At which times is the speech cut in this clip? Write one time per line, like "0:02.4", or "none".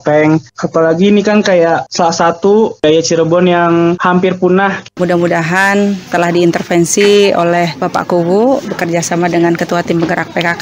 0:04.9
0:06.0